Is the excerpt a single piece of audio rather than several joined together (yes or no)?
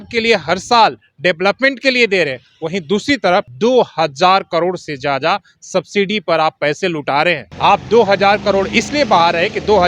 no